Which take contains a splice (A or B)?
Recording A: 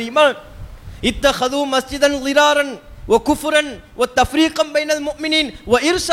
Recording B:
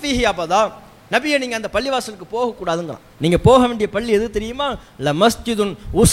B